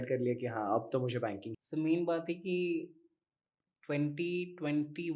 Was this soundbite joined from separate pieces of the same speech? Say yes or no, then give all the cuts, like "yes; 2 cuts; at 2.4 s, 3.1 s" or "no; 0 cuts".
yes; 1 cut; at 1.5 s